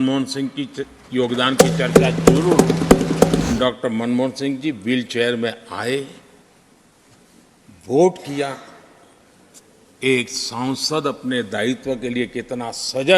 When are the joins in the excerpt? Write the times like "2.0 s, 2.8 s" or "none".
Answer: 3.5 s